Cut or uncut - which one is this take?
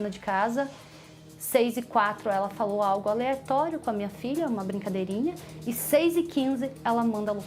uncut